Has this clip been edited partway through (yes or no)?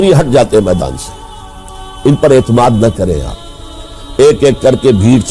yes